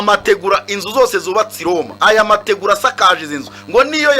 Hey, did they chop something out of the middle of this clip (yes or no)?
yes